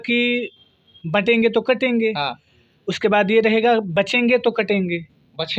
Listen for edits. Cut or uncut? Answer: uncut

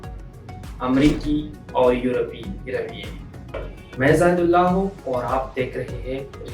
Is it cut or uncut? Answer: cut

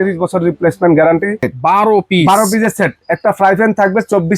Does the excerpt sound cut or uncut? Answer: cut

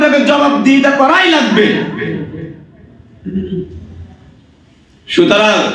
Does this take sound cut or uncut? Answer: uncut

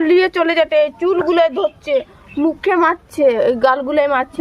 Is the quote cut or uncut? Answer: uncut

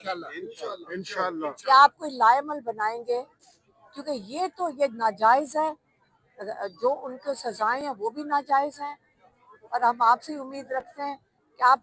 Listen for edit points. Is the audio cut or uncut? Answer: uncut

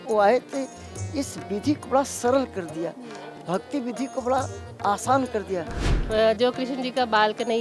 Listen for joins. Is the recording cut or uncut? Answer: cut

